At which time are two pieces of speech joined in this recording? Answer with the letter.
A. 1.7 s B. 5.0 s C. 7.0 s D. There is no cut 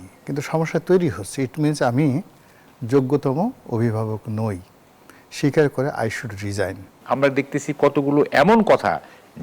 C